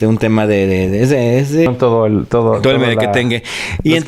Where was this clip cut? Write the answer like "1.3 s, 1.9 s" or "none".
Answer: 1.7 s